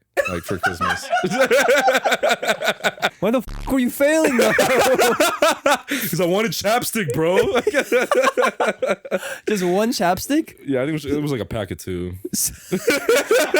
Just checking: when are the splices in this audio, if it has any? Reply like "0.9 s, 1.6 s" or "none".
3.1 s